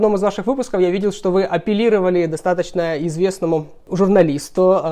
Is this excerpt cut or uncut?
cut